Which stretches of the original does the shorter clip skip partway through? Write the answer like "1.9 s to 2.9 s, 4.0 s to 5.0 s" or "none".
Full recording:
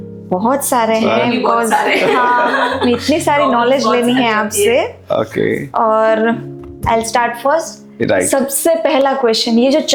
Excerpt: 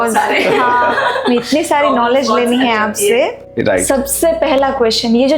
5.0 s to 7.8 s